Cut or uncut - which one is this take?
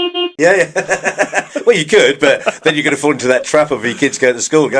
uncut